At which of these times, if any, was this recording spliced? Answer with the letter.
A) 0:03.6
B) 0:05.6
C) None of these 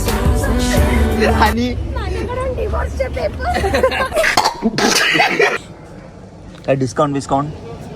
B